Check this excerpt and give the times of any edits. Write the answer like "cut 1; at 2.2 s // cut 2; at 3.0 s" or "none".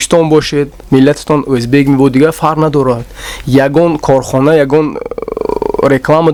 none

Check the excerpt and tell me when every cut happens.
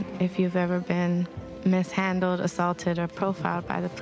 cut 1; at 1.4 s

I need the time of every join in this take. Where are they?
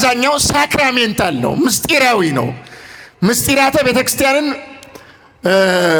none

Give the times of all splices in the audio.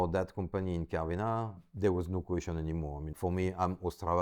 cut 1; at 1.6 s // cut 2; at 3.1 s

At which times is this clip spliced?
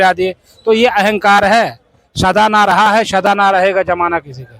none

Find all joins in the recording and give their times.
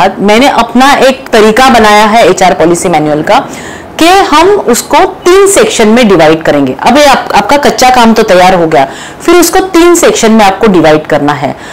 cut 1; at 1.2 s

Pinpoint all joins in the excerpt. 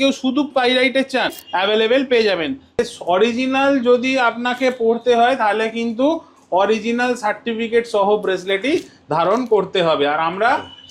cut 1; at 1.4 s // cut 2; at 2.8 s

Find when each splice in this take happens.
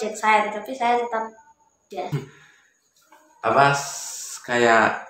cut 1; at 2.1 s

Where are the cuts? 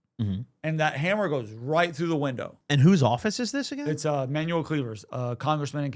cut 1; at 2.5 s

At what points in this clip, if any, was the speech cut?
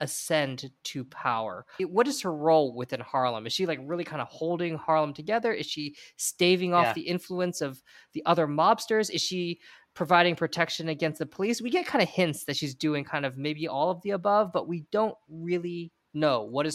cut 1; at 1.6 s

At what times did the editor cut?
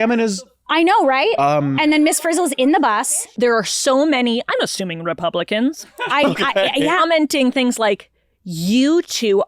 cut 1; at 3.3 s // cut 2; at 7.0 s

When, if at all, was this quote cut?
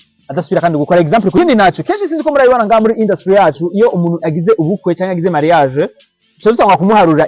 cut 1; at 1.3 s

